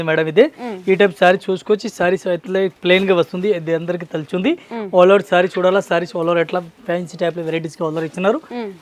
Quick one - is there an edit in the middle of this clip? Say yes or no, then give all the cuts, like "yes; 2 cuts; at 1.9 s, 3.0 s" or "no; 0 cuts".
no; 0 cuts